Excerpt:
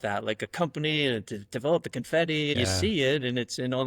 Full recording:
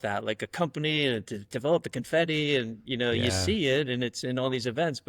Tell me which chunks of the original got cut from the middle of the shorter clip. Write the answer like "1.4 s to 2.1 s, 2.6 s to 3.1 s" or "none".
2.5 s to 3.2 s